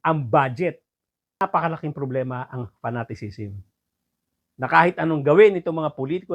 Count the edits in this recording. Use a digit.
1